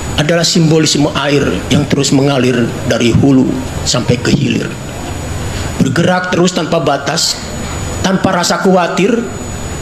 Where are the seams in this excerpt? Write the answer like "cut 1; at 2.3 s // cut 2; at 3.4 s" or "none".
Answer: none